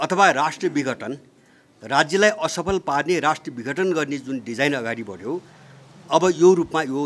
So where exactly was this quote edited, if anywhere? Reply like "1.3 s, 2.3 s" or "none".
none